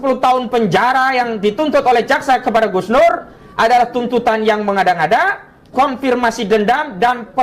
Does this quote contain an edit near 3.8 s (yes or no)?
no